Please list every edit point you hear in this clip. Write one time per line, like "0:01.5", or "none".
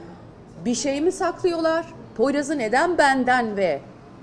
none